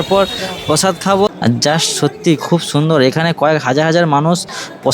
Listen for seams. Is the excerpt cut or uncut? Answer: cut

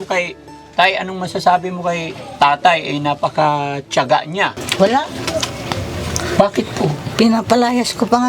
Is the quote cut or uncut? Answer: cut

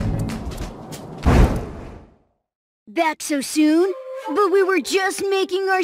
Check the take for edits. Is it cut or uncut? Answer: cut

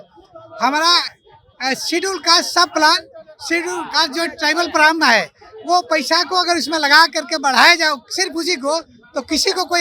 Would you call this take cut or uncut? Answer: uncut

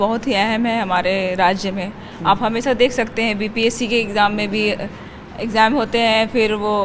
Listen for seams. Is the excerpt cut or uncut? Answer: uncut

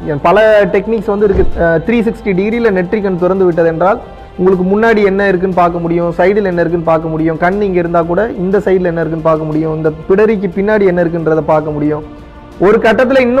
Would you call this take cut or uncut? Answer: cut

